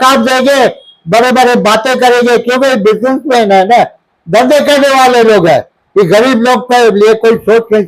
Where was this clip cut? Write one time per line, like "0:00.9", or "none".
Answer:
none